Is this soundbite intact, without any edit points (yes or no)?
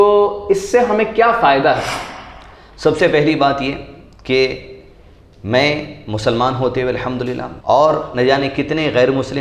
no